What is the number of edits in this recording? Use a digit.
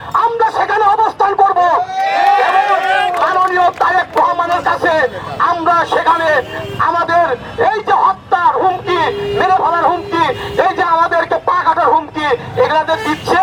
0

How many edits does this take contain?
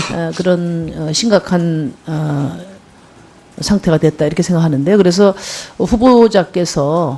1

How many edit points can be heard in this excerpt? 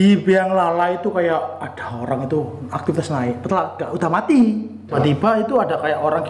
1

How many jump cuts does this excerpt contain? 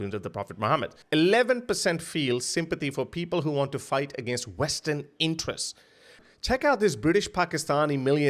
1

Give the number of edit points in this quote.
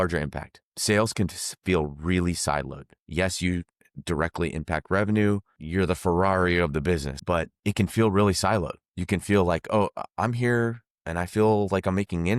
2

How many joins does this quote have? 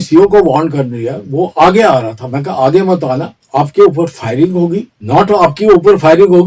2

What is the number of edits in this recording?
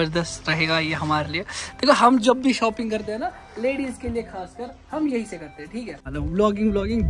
1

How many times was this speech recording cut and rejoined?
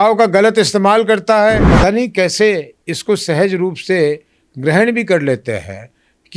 1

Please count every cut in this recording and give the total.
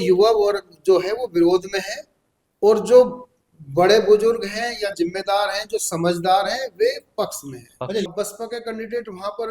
1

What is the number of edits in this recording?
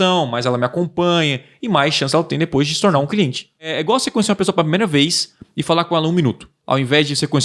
1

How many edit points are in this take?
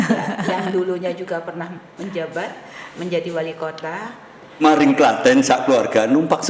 1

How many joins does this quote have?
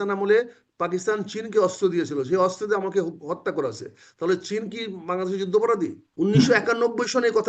1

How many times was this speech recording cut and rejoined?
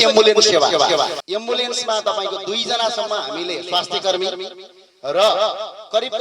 1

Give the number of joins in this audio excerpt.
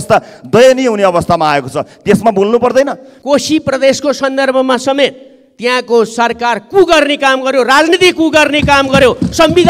1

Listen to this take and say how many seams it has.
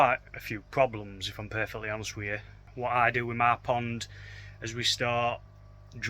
1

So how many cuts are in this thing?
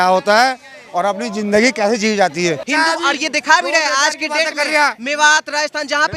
1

